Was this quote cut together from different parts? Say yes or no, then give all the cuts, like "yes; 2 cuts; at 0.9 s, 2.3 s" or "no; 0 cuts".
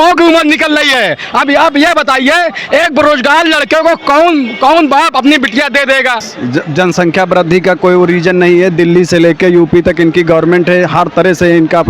yes; 1 cut; at 6.3 s